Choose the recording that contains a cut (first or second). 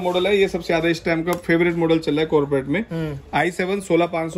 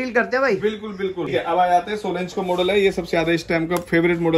second